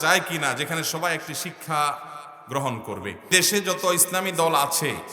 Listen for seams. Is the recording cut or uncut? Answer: cut